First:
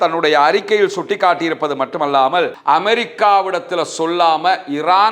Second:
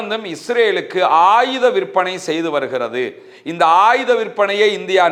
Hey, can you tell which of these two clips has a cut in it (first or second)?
first